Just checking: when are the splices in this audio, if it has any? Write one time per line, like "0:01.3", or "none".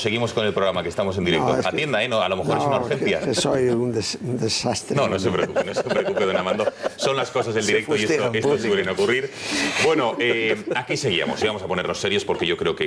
0:03.9